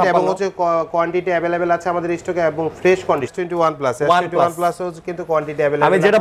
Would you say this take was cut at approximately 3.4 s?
yes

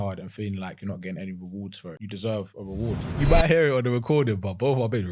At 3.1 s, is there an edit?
yes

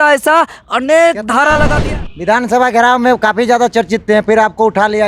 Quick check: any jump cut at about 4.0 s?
no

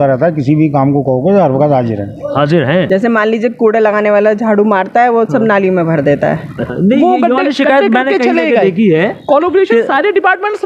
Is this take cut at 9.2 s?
no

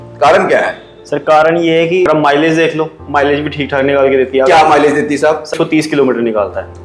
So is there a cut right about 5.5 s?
yes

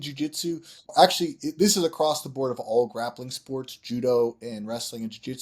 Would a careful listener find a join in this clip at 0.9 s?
yes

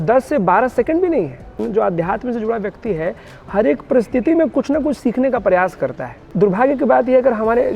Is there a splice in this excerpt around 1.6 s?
yes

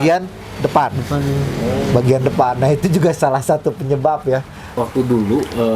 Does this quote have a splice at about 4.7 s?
yes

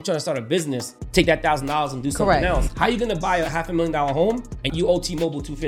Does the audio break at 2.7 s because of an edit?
yes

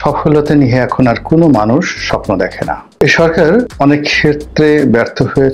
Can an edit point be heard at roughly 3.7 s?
yes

